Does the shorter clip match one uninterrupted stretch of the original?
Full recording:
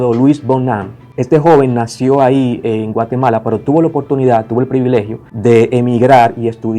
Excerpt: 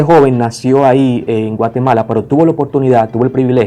yes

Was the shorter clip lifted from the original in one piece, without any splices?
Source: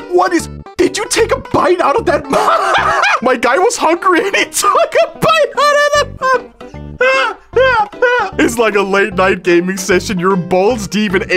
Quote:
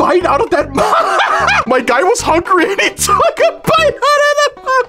yes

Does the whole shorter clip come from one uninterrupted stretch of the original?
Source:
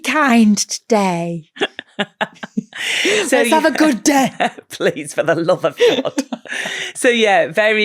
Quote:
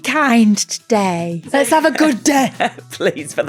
no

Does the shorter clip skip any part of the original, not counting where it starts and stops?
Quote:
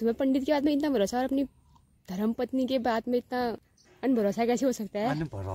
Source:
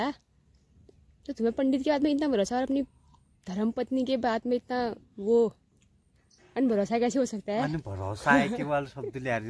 yes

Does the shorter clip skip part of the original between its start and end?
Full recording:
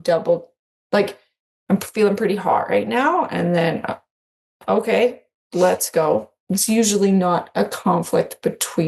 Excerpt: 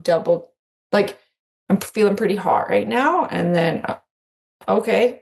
no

